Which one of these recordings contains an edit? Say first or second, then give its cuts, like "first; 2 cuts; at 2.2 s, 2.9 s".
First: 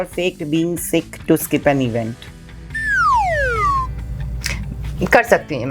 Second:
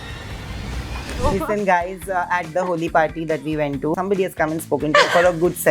second; 2 cuts; at 1.1 s, 3.9 s